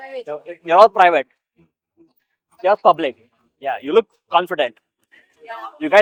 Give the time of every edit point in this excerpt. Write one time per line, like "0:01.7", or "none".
none